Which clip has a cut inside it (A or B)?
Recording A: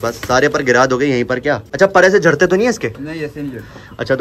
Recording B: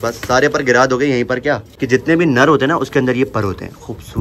B